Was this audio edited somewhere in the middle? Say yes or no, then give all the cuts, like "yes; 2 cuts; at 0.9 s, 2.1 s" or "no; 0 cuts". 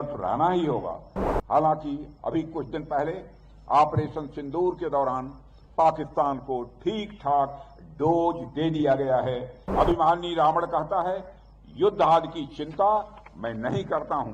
yes; 1 cut; at 9.6 s